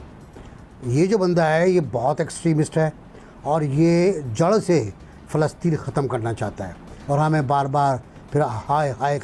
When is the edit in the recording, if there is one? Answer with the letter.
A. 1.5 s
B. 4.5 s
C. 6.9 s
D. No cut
C